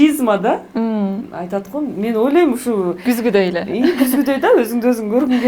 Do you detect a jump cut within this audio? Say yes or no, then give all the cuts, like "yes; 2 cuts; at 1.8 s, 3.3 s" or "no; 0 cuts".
no; 0 cuts